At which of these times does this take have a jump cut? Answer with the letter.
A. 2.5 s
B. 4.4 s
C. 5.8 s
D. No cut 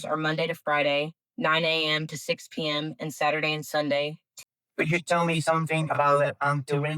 B